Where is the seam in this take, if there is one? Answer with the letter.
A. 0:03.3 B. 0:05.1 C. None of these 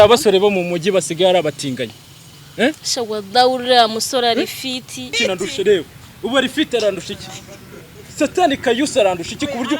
B